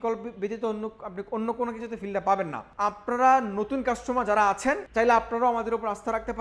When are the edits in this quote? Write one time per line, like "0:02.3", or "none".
0:02.6
0:04.8